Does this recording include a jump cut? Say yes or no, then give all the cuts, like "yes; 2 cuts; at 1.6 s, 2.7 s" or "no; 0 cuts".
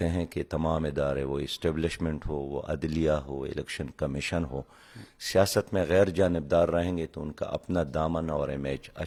no; 0 cuts